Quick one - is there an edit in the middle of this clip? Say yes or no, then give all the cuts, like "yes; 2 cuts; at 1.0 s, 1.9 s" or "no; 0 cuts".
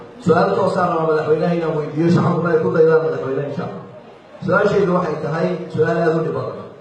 yes; 1 cut; at 2.5 s